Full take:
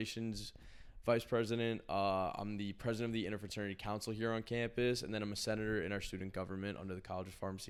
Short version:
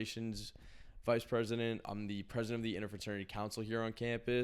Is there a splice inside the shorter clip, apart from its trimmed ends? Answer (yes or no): yes